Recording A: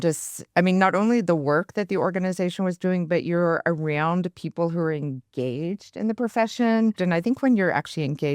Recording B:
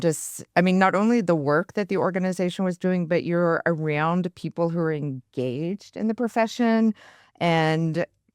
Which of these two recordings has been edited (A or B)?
A